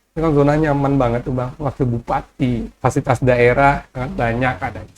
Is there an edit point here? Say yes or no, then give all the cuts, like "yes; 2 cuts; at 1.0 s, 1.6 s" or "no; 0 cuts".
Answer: yes; 2 cuts; at 2.7 s, 4.0 s